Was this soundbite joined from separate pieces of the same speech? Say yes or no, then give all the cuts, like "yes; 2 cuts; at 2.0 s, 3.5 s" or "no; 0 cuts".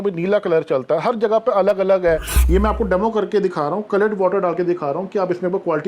yes; 1 cut; at 2.3 s